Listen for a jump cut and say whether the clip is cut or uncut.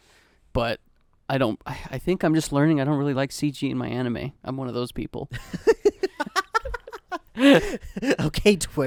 uncut